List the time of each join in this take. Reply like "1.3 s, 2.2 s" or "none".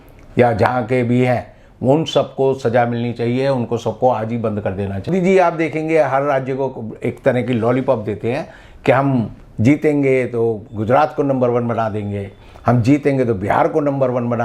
5.1 s